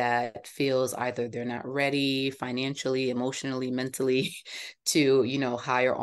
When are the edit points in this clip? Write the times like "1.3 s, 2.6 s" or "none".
none

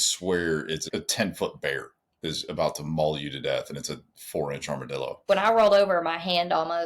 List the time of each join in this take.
0.9 s, 5.2 s

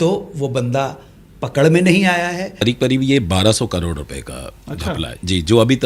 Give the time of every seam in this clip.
2.5 s

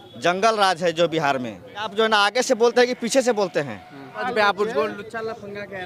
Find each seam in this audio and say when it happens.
1.9 s, 4.2 s

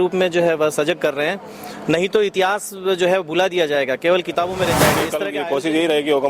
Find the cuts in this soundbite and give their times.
5.1 s

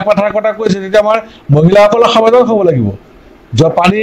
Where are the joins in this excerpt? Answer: 1.3 s

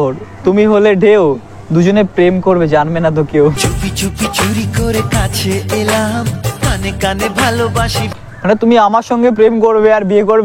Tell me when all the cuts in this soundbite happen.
8.0 s

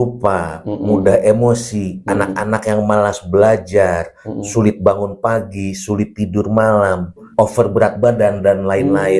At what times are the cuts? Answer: 7.2 s

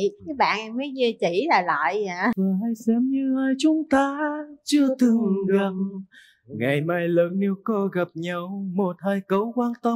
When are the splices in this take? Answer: 2.4 s

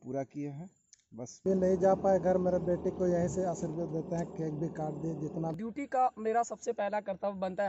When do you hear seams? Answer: 1.4 s, 5.6 s

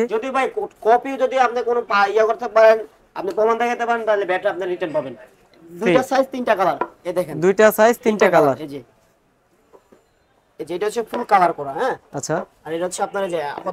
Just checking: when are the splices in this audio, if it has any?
none

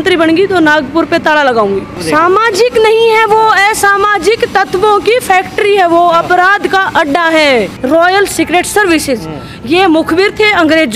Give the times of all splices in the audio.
1.9 s, 7.8 s

